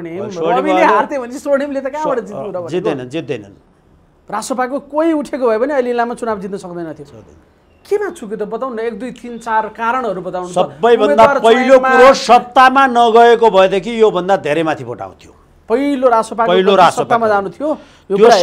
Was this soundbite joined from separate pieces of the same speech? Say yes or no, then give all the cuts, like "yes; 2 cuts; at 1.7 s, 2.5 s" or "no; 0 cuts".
no; 0 cuts